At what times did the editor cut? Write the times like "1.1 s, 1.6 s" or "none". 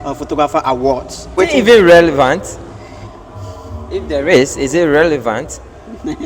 1.4 s